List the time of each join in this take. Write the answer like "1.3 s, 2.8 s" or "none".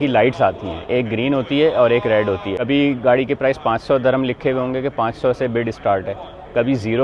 2.5 s